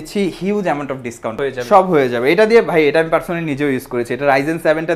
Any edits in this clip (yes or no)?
yes